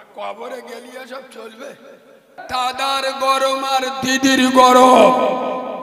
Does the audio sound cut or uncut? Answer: cut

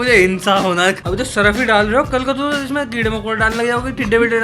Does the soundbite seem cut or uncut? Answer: cut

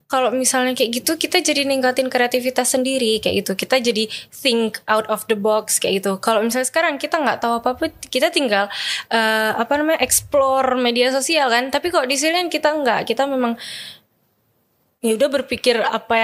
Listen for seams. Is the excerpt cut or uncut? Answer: uncut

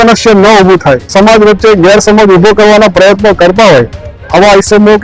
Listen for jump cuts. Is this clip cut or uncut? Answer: cut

